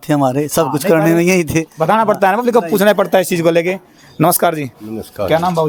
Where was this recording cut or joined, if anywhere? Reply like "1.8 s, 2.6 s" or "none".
none